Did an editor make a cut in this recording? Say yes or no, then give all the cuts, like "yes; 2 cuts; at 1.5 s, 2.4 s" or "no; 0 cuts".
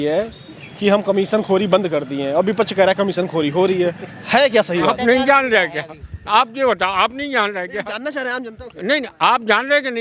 no; 0 cuts